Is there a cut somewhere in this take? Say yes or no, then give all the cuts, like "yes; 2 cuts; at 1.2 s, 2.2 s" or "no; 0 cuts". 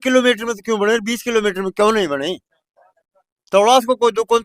no; 0 cuts